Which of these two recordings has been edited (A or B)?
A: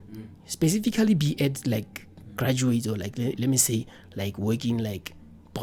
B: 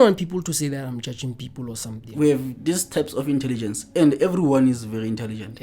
B